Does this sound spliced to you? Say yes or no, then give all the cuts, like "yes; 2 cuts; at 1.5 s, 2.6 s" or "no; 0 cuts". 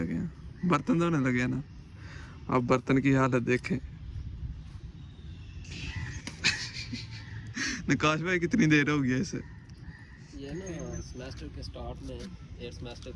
no; 0 cuts